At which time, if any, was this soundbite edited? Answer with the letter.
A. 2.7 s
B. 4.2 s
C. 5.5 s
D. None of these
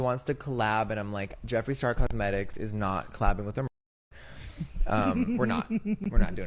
D